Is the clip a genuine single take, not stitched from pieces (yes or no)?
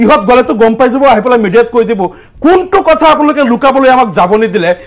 yes